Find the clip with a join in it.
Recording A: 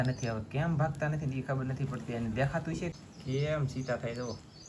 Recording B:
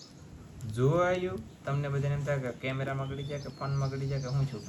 A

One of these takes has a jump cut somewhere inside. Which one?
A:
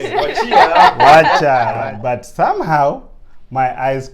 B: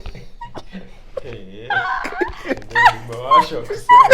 A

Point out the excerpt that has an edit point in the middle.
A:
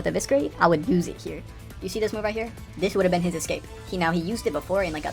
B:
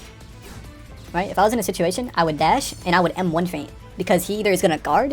A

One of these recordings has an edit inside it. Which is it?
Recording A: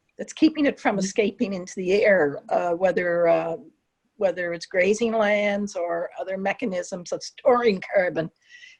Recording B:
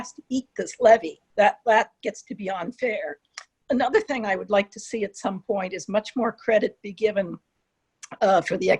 B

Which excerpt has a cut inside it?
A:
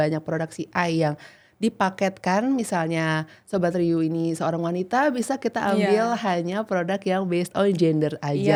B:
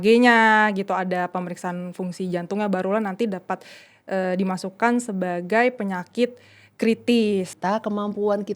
B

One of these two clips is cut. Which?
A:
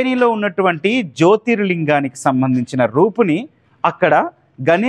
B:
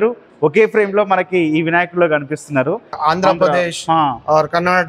B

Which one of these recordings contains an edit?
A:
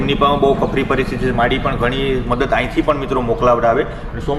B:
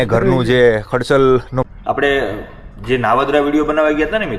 B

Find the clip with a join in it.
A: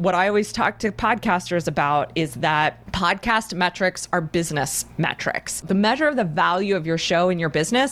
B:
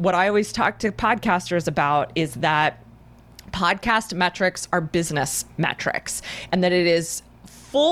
A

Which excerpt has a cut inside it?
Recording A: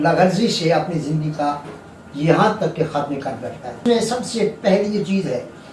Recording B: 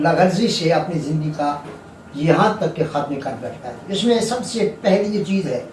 A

